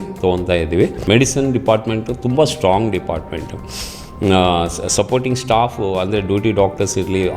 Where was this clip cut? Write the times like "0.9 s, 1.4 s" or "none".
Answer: 1.0 s